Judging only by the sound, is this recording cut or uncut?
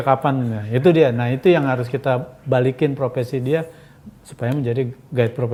uncut